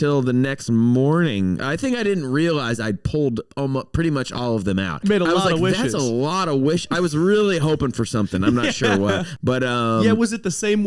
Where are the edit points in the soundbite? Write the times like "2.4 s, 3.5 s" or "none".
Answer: 1.6 s, 5.0 s, 9.3 s